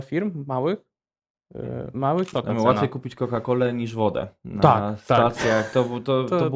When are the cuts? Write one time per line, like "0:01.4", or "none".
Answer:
0:02.3